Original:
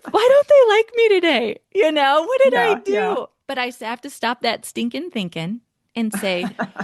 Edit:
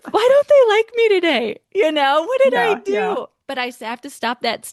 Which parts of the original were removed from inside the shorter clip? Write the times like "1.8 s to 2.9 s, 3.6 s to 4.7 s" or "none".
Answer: none